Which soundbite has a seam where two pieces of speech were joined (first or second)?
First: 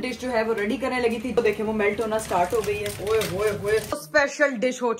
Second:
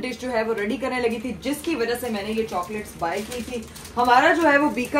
first